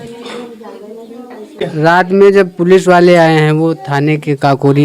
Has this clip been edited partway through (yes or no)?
yes